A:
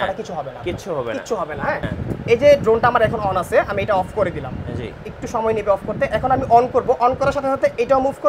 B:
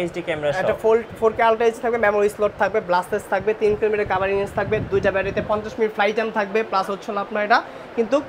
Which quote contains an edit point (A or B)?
A